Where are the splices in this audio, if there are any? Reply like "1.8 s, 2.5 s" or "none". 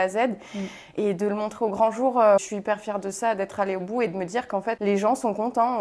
2.5 s, 4.8 s